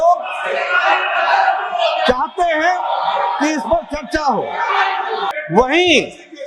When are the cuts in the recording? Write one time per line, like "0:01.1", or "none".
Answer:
0:05.3